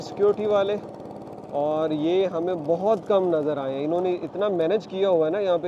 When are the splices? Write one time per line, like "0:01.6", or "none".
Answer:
none